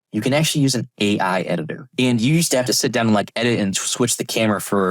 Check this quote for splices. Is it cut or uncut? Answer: cut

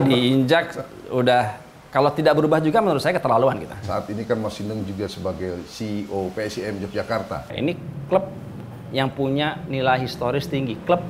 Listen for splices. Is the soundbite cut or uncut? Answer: cut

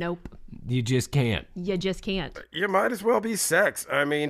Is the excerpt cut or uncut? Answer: cut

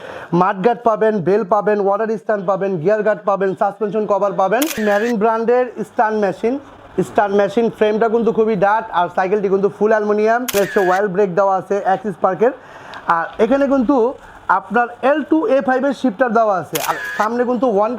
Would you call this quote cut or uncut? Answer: cut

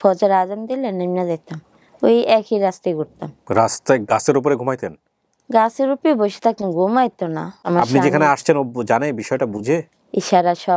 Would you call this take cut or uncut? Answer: cut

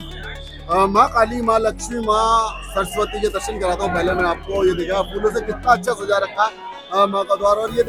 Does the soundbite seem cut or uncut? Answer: uncut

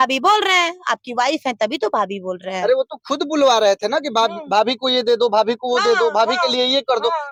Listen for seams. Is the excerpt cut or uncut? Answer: uncut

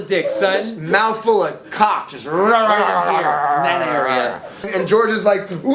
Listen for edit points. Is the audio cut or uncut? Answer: cut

